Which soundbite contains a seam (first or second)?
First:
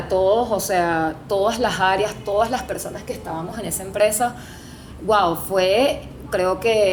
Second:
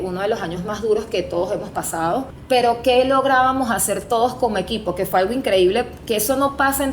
second